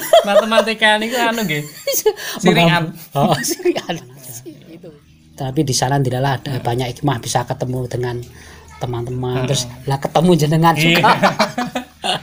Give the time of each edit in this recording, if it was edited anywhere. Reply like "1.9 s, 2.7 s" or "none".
4.7 s